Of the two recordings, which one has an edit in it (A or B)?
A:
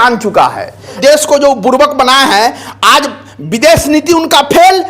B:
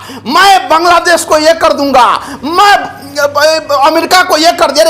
A